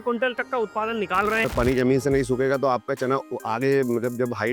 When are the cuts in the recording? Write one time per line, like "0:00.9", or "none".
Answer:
0:01.5
0:03.3